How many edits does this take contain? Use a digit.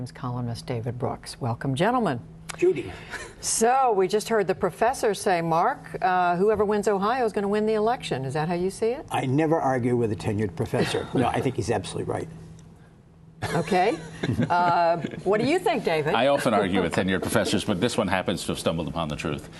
0